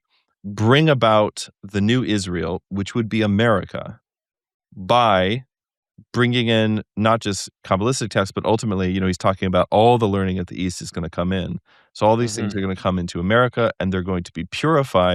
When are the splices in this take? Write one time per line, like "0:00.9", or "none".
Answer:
none